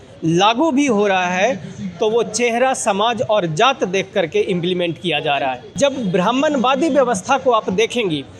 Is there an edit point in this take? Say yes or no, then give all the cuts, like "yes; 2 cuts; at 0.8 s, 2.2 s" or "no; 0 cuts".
yes; 1 cut; at 5.6 s